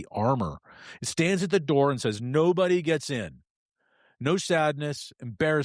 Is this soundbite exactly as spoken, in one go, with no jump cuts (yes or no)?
yes